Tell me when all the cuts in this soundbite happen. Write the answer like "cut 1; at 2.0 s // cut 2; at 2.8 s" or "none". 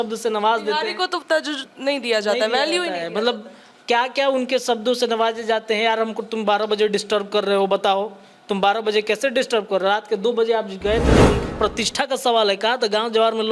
cut 1; at 11.4 s